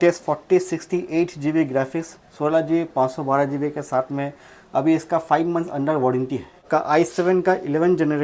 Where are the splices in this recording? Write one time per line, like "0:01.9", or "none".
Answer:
0:06.6

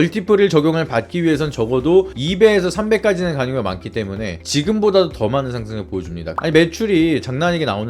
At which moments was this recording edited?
0:06.2

